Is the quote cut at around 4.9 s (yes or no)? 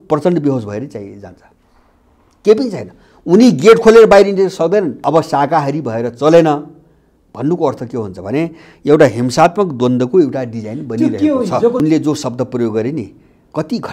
yes